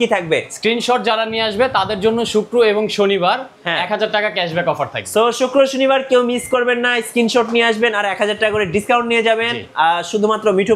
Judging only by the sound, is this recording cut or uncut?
uncut